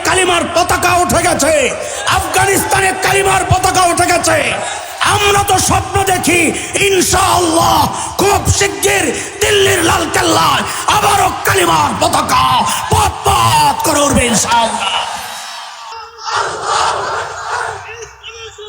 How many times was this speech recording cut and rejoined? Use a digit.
1